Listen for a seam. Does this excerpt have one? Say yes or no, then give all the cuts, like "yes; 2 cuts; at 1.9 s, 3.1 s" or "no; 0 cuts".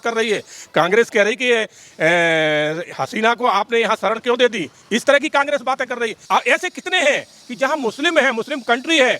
yes; 1 cut; at 6.2 s